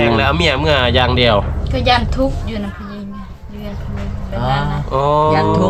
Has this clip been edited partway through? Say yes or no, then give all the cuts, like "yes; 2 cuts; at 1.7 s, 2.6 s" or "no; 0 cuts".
no; 0 cuts